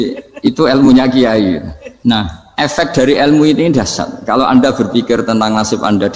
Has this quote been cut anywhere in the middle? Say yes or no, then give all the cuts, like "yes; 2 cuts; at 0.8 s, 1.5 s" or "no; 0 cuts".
yes; 1 cut; at 2.2 s